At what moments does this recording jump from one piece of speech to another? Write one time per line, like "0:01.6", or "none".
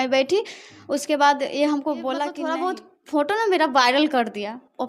0:02.4